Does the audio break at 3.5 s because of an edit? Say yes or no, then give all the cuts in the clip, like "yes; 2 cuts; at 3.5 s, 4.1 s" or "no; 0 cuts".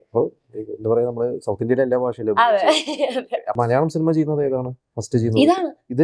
yes; 1 cut; at 3.5 s